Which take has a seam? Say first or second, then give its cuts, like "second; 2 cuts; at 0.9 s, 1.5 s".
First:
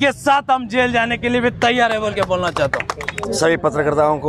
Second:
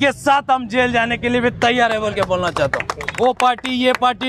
second; 1 cut; at 3.0 s